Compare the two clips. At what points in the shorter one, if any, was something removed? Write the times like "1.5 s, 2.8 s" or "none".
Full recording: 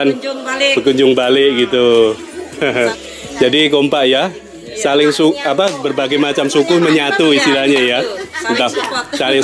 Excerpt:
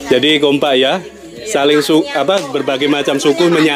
none